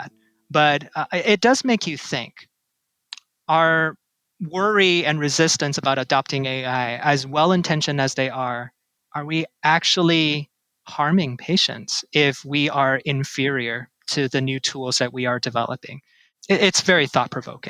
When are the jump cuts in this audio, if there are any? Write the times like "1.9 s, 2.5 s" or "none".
16.4 s